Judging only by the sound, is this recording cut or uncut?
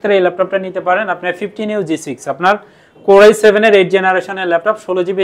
uncut